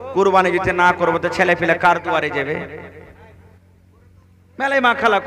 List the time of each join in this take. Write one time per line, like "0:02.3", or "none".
none